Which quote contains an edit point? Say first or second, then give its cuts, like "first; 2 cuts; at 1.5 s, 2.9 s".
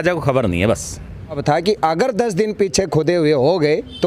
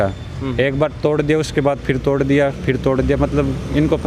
first; 1 cut; at 1.4 s